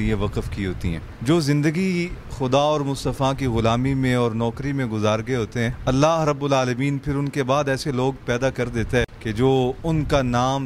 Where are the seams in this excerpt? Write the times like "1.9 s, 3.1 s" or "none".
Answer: 1.1 s, 5.8 s, 9.2 s